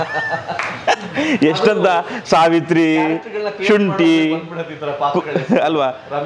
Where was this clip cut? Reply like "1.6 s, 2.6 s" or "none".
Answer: none